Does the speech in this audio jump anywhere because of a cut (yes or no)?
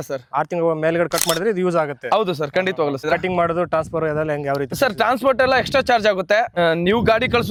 no